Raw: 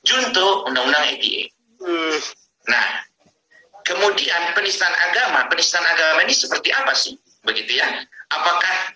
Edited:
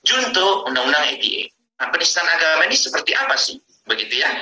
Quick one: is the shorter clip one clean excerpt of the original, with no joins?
no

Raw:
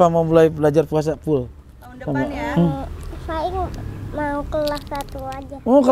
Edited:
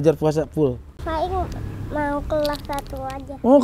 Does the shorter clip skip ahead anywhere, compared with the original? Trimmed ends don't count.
yes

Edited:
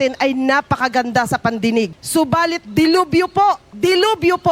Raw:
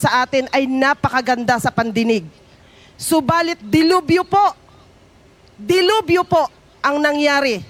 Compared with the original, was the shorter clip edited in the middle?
yes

